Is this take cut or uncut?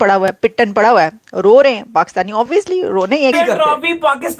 cut